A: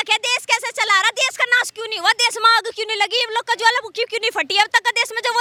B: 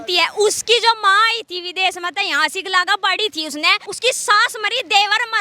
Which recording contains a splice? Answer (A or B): B